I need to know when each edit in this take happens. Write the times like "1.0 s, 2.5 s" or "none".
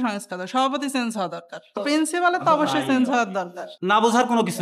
3.6 s